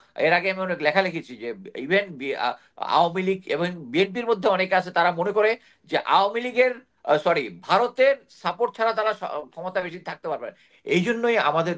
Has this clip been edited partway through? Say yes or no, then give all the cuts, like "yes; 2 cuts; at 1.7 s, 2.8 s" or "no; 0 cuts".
yes; 1 cut; at 10.6 s